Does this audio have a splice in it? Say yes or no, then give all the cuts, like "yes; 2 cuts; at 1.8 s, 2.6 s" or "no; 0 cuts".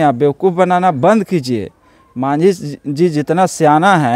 no; 0 cuts